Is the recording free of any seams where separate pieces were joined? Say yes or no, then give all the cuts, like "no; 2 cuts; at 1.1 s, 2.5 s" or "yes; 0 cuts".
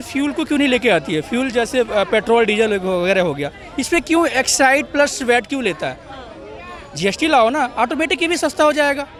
yes; 0 cuts